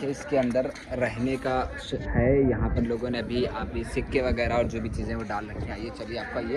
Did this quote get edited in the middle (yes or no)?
no